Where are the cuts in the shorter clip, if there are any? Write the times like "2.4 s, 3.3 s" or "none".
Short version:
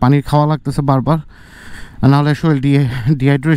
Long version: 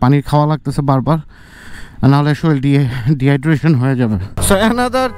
none